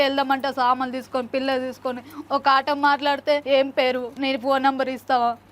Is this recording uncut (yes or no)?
no